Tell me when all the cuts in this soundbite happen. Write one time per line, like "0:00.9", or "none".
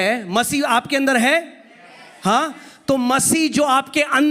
none